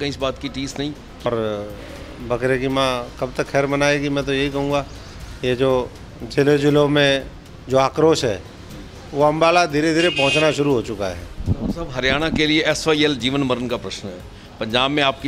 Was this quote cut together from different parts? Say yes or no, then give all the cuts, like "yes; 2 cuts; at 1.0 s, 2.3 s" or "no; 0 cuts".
yes; 2 cuts; at 1.3 s, 11.4 s